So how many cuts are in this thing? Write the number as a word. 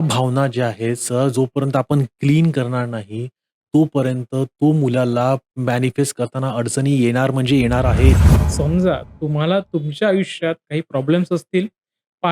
one